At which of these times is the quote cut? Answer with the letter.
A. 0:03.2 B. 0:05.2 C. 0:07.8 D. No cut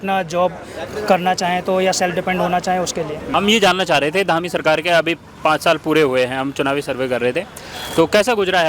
A